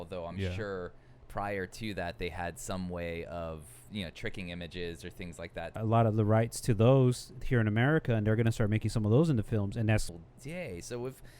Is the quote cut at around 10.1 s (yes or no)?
yes